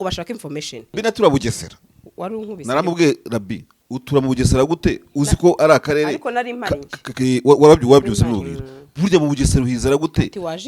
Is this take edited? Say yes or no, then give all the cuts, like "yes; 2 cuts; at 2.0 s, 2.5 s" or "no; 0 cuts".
yes; 1 cut; at 1.0 s